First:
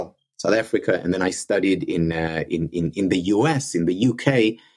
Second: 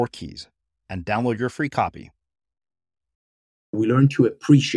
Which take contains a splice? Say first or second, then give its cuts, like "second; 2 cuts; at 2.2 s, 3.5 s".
second; 1 cut; at 3.8 s